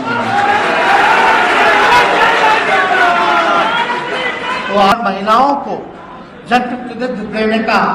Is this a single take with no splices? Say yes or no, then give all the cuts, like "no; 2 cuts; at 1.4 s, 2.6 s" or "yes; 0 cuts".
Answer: yes; 0 cuts